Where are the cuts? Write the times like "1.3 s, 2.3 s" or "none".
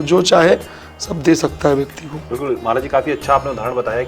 none